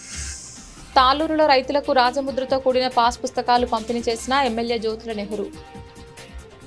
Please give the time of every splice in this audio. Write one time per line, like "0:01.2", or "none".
0:00.9
0:05.5